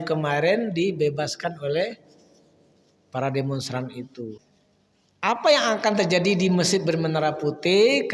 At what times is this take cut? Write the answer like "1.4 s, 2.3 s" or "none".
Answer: 4.5 s